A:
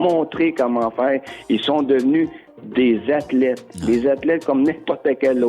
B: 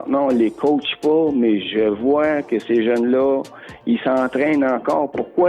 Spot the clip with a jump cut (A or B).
A